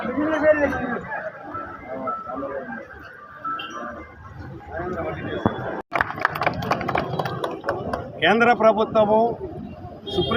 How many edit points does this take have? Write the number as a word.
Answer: one